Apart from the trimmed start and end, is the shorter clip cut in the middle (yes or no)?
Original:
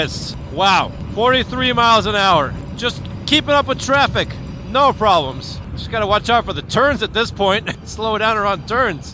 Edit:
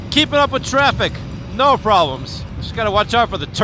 no